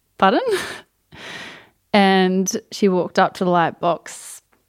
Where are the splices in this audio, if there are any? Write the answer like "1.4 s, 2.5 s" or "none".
none